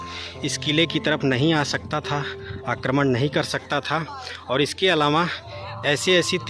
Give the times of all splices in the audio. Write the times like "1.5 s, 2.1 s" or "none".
none